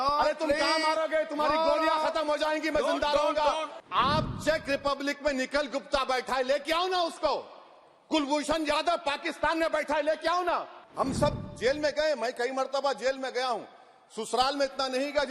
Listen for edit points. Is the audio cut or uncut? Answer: cut